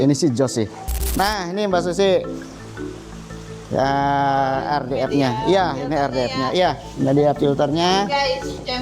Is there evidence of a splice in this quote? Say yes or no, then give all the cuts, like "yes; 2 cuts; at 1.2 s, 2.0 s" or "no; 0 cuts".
yes; 1 cut; at 1.1 s